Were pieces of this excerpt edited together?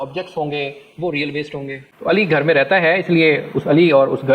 yes; 1 cut; at 1.8 s

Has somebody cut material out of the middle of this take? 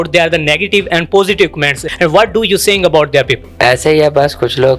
yes; 2 cuts; at 1.8 s, 3.5 s

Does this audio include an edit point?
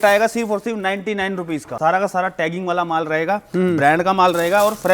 yes; 1 cut; at 1.7 s

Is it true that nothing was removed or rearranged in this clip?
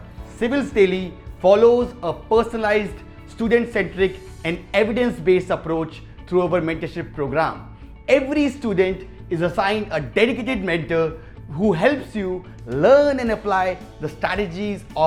yes; 0 cuts

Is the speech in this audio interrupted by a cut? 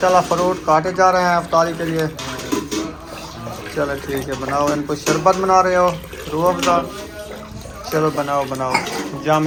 no; 0 cuts

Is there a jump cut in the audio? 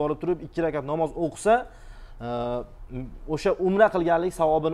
no; 0 cuts

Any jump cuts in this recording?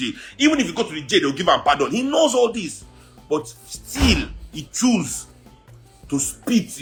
no; 0 cuts

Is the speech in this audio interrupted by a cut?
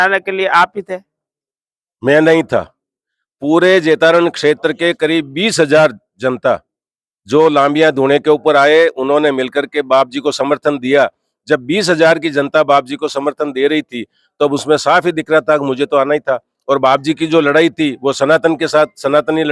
no; 0 cuts

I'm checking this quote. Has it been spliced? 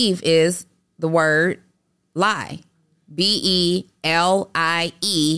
no; 0 cuts

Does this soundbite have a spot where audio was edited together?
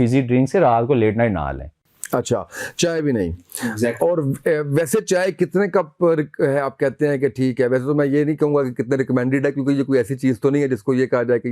no; 0 cuts

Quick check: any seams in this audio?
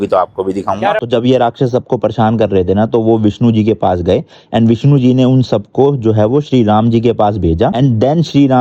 yes; 1 cut; at 1.0 s

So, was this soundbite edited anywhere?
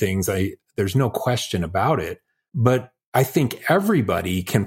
yes; 1 cut; at 2.6 s

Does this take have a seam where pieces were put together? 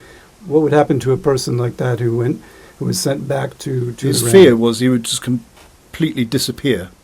yes; 1 cut; at 4.3 s

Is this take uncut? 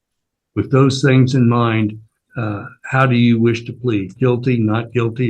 yes; 0 cuts

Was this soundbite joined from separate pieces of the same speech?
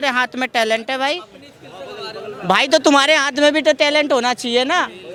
no; 0 cuts

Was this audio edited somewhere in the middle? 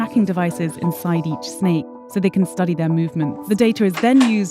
yes; 2 cuts; at 2.0 s, 3.4 s

